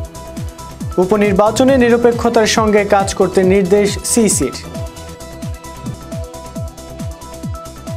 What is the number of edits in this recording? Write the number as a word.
two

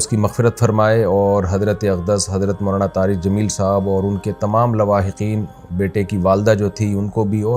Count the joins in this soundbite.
zero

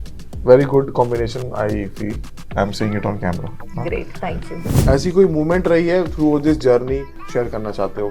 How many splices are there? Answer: two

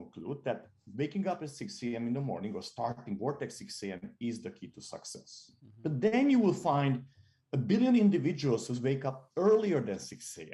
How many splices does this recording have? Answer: zero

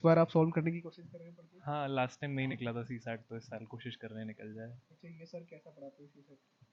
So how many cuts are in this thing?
zero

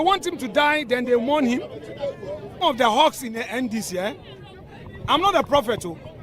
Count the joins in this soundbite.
one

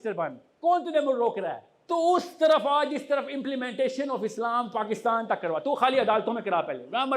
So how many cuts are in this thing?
one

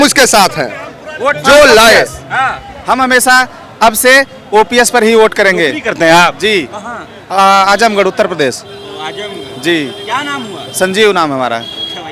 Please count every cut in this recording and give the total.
zero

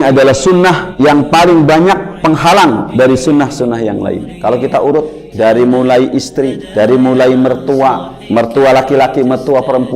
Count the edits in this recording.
one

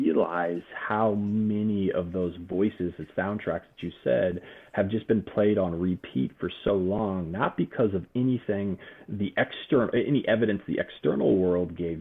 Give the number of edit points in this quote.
zero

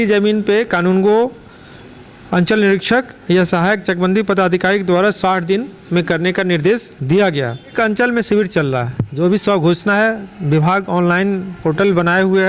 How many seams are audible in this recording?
one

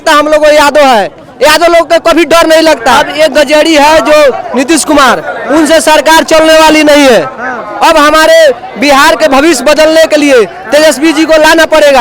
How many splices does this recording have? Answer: one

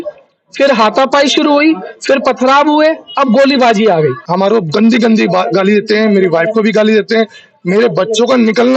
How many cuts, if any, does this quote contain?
one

